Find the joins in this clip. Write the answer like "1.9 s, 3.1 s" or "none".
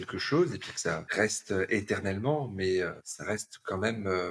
1.1 s, 3.1 s